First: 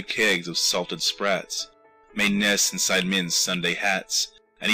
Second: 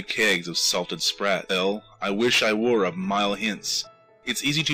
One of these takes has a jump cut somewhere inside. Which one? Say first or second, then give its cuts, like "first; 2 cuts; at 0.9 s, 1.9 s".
first; 1 cut; at 1.4 s